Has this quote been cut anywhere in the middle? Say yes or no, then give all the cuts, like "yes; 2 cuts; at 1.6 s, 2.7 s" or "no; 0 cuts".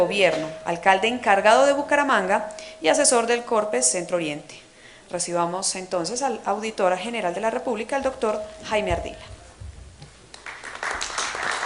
no; 0 cuts